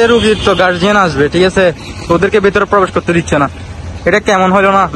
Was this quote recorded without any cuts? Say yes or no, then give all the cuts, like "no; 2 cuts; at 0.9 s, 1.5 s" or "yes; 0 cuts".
yes; 0 cuts